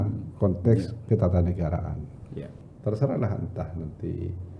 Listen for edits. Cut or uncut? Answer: cut